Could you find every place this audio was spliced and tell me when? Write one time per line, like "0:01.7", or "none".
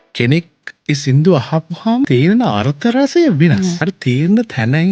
0:02.1
0:03.9